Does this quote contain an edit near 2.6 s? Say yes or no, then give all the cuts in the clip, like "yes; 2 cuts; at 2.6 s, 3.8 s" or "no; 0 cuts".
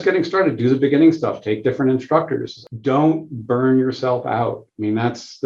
yes; 1 cut; at 2.6 s